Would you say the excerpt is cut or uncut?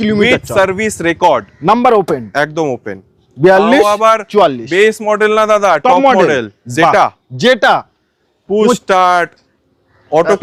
uncut